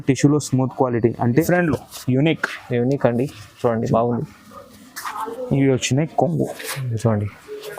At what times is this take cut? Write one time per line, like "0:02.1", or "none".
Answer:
0:01.5